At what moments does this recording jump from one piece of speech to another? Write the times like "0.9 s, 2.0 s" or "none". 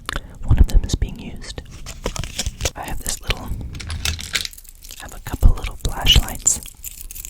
2.7 s